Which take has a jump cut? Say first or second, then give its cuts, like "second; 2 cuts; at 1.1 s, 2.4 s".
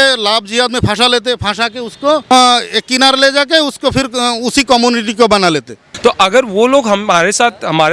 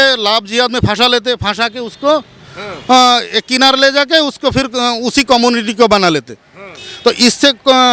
first; 2 cuts; at 2.2 s, 5.8 s